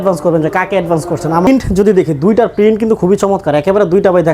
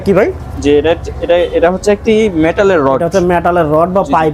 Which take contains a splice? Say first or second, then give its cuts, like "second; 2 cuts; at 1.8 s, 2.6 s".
first; 1 cut; at 1.5 s